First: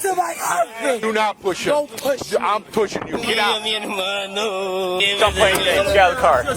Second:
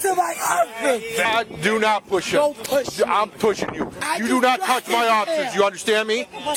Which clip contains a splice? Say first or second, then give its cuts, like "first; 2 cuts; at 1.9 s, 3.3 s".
first; 3 cuts; at 1.0 s, 3.3 s, 5.0 s